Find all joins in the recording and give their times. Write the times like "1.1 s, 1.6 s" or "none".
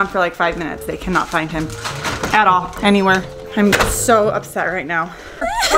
none